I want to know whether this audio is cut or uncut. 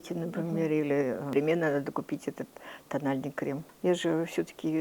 cut